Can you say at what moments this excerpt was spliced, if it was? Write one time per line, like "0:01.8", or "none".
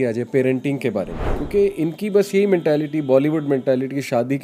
none